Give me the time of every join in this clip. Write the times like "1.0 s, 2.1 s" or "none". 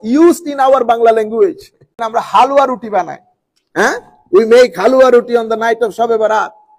2.0 s